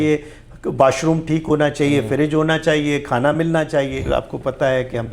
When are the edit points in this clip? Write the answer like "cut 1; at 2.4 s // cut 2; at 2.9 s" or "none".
cut 1; at 4.0 s